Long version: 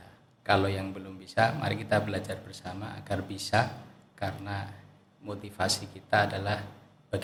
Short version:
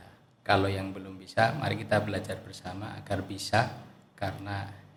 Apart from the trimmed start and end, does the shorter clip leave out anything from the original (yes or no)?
no